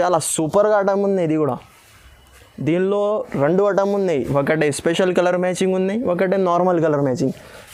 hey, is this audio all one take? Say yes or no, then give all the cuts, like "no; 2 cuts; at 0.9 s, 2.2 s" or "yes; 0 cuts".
yes; 0 cuts